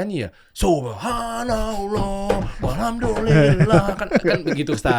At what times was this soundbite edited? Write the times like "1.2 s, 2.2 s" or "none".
none